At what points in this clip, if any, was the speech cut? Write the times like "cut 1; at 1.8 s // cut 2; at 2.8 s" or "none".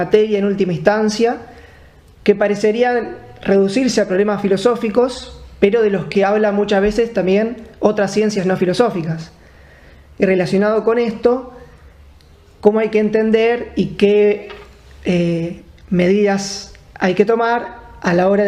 cut 1; at 8.0 s